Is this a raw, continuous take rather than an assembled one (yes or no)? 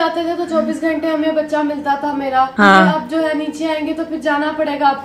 yes